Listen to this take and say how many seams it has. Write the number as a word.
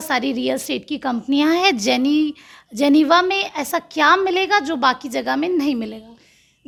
zero